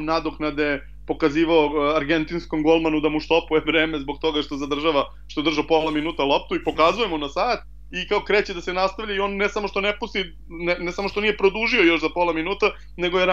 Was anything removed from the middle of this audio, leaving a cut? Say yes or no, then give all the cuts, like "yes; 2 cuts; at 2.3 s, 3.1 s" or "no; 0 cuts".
no; 0 cuts